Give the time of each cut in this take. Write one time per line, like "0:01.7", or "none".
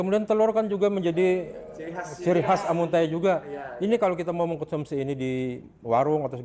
none